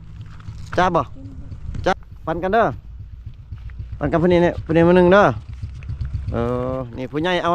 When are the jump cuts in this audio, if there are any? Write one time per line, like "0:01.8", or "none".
0:01.9